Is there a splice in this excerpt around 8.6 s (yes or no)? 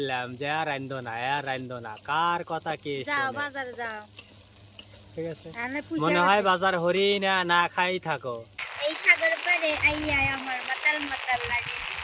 yes